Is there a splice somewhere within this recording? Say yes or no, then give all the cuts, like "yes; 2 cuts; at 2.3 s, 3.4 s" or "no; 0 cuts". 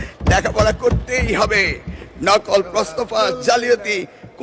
no; 0 cuts